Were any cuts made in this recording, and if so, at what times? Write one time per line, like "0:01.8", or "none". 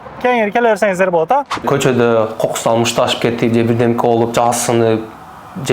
0:01.6